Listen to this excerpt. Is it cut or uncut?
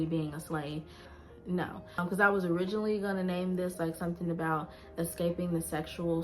cut